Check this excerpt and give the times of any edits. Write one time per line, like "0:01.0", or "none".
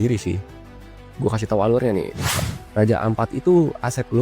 0:02.2

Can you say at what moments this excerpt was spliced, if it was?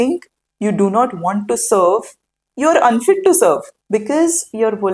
0:03.7

